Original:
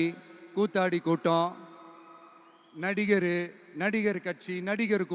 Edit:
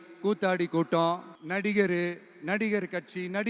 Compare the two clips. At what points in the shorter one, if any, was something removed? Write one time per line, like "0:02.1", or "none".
0:01.3